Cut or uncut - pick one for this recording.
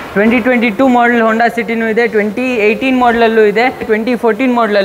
cut